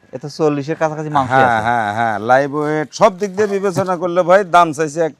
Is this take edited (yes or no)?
no